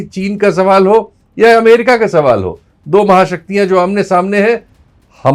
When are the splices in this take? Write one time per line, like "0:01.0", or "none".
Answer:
none